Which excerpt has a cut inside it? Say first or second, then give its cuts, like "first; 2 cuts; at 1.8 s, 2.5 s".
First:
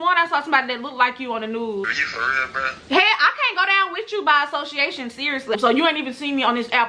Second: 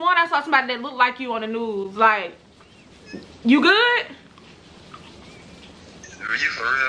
first; 2 cuts; at 1.9 s, 5.5 s